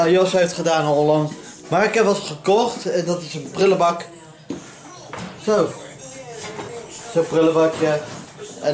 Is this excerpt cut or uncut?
uncut